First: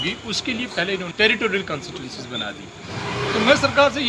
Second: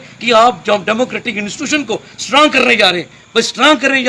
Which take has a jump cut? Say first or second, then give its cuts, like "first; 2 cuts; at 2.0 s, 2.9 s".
first; 1 cut; at 1.1 s